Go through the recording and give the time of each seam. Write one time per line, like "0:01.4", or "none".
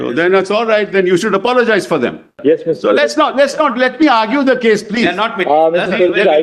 0:02.3